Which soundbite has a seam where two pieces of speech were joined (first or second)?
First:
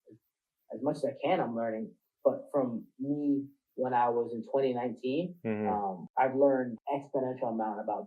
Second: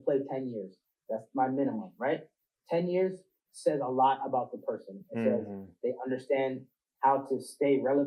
first